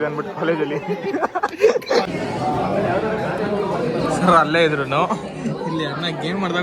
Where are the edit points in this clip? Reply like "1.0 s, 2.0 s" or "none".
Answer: 2.1 s

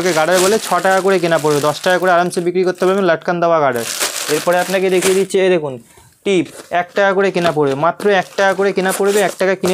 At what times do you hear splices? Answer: none

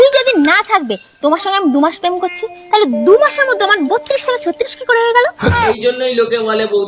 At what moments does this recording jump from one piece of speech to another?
5.6 s

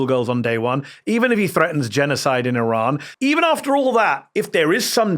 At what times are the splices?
3.1 s

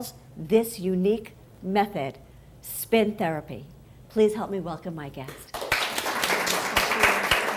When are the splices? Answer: 4.6 s

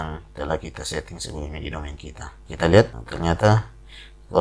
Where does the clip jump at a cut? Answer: 2.3 s, 3.0 s

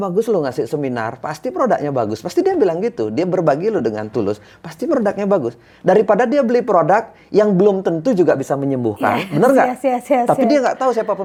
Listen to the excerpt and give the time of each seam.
none

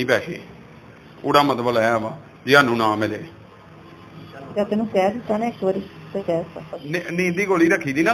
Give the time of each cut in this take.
6.7 s

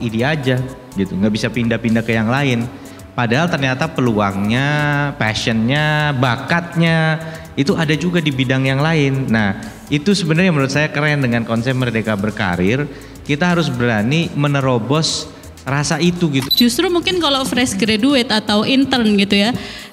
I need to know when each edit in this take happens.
16.5 s

